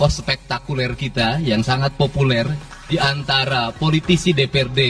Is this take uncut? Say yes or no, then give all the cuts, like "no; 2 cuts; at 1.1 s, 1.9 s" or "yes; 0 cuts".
no; 1 cut; at 2.7 s